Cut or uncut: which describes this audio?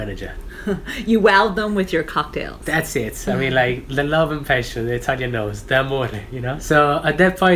cut